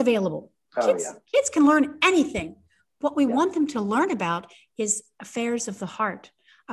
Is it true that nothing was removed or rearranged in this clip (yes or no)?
yes